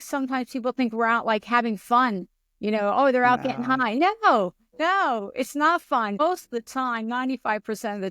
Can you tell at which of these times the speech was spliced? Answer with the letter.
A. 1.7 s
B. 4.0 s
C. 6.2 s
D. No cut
C